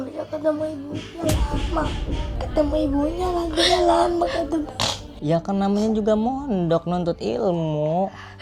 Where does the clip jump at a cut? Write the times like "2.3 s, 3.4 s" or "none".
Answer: none